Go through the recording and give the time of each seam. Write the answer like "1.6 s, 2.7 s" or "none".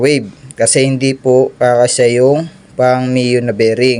none